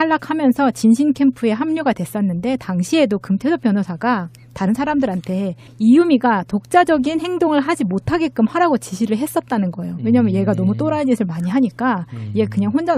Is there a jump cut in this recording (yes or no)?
no